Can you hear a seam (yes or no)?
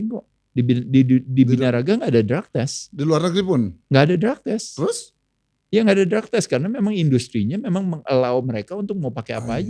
no